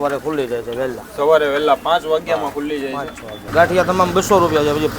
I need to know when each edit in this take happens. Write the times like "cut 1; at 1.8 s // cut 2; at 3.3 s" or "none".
cut 1; at 3.5 s